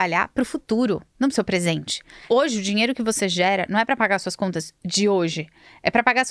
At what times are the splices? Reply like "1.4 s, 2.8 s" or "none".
2.2 s